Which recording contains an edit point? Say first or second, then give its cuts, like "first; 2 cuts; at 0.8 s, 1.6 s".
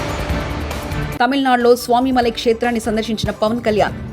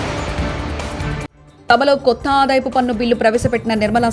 first; 1 cut; at 1.1 s